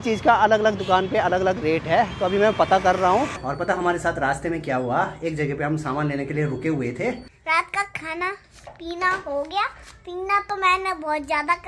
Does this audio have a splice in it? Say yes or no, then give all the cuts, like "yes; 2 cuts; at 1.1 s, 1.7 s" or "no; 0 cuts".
yes; 2 cuts; at 3.5 s, 7.3 s